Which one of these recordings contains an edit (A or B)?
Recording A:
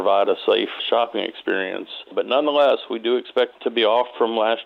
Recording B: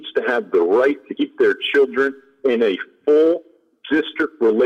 A